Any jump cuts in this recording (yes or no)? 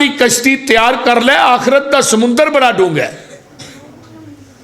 no